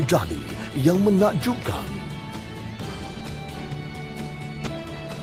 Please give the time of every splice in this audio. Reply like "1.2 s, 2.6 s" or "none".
none

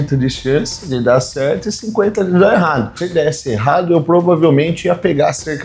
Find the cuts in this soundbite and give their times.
3.0 s

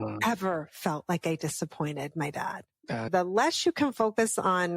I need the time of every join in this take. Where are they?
3.1 s

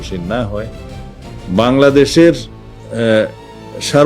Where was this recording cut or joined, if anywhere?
1.2 s

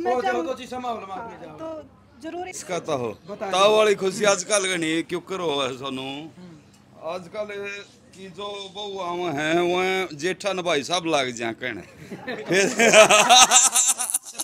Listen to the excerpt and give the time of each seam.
2.6 s

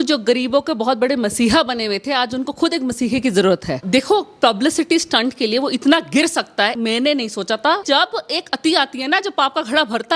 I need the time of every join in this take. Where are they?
3.8 s, 6.7 s, 7.8 s

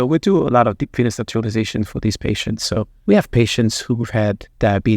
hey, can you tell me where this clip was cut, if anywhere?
2.9 s

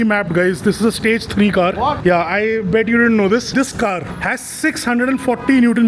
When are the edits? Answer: 3.5 s

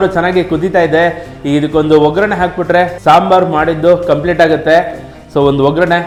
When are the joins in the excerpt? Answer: none

